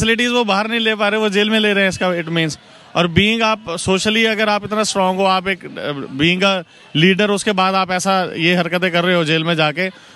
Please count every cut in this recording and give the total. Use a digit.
0